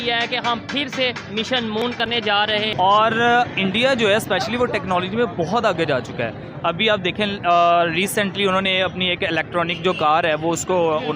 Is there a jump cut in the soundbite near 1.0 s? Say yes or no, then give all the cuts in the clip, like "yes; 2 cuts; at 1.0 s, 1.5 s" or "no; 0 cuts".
no; 1 cut; at 2.7 s